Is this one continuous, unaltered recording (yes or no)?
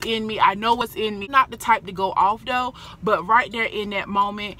no